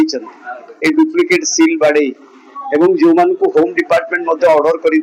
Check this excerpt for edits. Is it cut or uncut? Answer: uncut